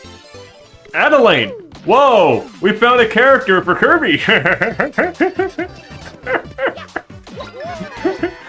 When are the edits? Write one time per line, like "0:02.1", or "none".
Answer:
0:00.9